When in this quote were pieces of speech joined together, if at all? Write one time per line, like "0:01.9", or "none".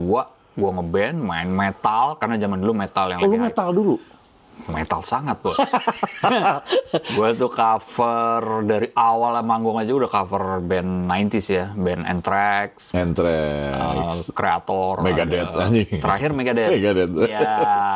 none